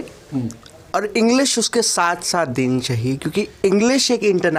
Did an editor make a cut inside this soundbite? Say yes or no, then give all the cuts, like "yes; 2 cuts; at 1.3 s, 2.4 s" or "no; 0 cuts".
no; 0 cuts